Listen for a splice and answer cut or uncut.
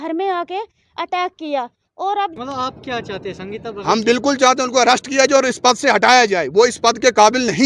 cut